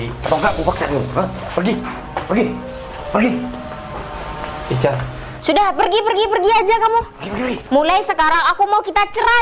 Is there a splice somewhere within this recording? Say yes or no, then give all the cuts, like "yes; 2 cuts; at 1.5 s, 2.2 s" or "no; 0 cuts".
no; 0 cuts